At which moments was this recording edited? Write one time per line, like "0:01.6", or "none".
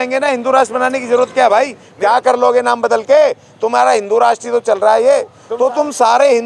0:01.8
0:05.4